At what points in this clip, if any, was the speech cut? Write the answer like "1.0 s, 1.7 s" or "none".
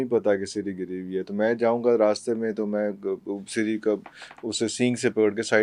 none